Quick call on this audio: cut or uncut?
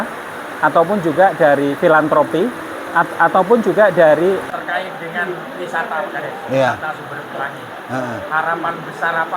cut